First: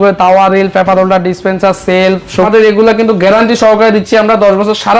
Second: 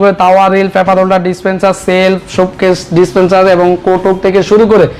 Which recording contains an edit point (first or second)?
first